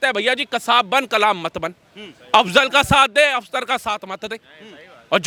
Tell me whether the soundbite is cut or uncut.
uncut